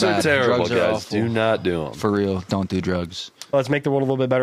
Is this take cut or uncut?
cut